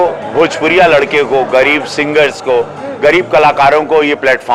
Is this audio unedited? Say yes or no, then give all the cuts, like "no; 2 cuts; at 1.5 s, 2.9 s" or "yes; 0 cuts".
yes; 0 cuts